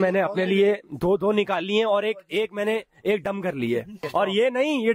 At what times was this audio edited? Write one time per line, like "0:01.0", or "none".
0:04.0